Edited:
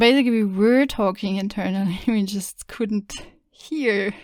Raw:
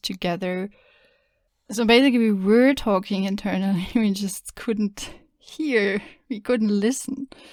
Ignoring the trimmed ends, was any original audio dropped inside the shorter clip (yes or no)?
no